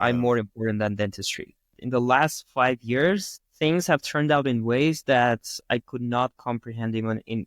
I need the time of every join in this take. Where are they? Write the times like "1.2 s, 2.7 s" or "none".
1.7 s